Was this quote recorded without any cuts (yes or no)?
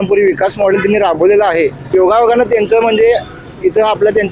no